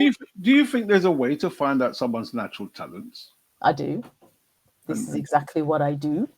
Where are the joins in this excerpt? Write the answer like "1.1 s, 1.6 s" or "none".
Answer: none

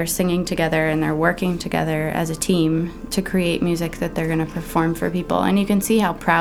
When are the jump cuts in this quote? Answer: none

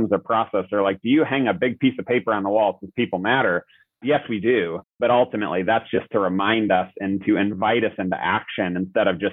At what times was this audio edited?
4.0 s

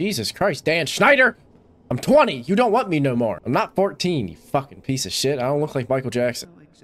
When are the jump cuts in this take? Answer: none

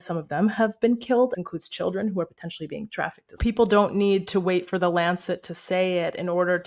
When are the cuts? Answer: 1.3 s, 3.4 s

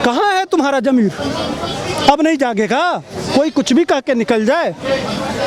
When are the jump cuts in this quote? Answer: none

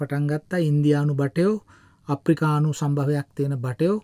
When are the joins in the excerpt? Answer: none

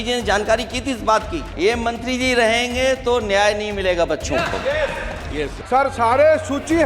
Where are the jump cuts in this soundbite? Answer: 1.5 s, 5.5 s

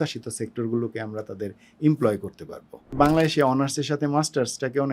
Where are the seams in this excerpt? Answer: 2.9 s

